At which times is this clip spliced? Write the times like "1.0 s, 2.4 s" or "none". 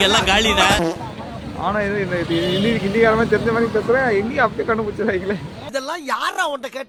none